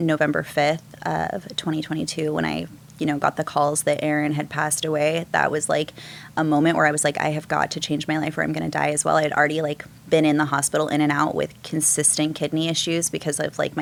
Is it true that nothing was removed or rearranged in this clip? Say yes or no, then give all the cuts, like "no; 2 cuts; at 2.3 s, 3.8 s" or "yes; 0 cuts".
yes; 0 cuts